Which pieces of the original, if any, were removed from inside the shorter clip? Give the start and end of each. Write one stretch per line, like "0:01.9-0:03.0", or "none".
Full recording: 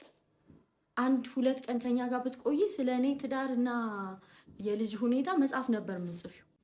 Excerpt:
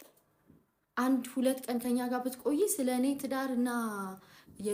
none